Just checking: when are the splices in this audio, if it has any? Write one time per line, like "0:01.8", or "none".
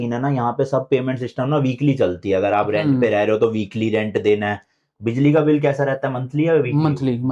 none